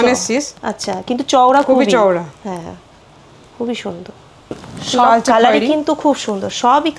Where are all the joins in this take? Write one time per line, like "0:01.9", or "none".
0:04.6